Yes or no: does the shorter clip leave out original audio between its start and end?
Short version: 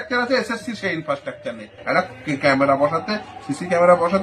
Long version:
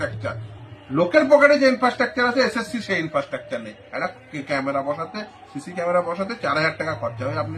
no